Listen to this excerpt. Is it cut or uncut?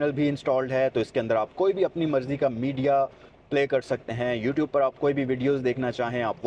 uncut